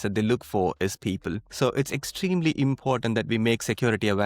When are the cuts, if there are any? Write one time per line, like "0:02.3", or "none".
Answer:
0:01.4